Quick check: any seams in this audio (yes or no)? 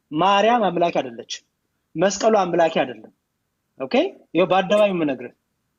no